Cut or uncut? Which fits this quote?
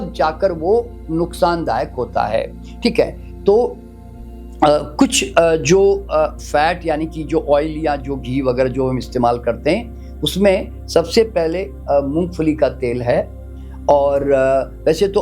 uncut